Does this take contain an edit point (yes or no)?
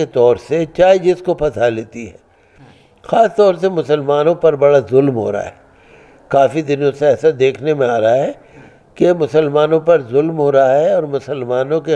no